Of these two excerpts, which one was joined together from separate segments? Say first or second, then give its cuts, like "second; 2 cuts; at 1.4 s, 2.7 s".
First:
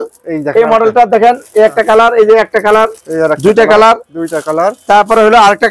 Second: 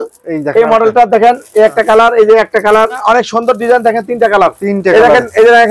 second; 1 cut; at 3.0 s